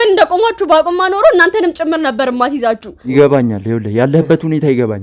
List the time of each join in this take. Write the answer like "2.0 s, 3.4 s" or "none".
2.9 s